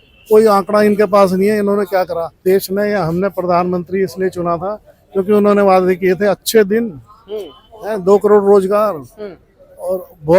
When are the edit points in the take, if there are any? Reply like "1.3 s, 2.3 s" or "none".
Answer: 2.3 s